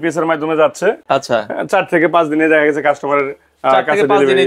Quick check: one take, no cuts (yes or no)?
yes